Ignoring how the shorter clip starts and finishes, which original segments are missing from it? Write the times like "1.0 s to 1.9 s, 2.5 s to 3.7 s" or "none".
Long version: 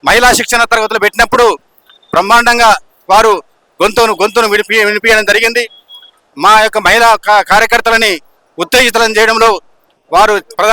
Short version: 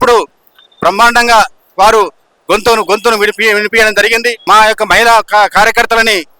5.7 s to 6.3 s